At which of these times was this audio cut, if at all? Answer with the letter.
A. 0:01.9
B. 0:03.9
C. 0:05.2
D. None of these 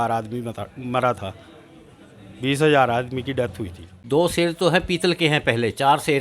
B